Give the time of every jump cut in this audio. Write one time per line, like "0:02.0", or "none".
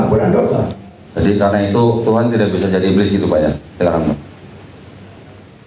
0:01.0